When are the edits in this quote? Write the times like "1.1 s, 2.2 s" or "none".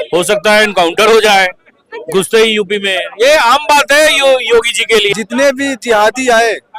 5.1 s